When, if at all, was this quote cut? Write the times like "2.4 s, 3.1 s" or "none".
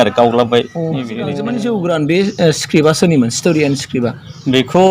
1.3 s